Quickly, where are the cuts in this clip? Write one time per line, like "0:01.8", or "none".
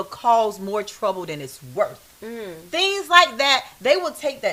none